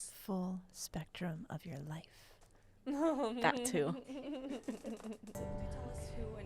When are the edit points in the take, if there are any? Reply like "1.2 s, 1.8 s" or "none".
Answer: 5.3 s